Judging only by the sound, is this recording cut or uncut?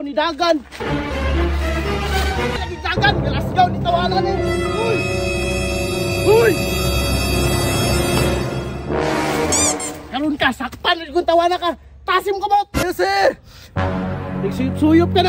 cut